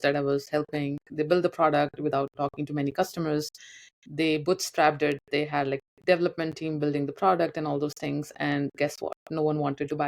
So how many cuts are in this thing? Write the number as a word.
two